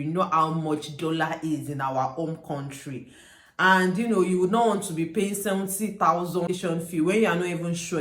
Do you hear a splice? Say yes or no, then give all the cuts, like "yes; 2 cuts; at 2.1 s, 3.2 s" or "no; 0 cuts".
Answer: yes; 1 cut; at 6.5 s